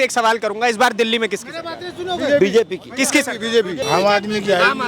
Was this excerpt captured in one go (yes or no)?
no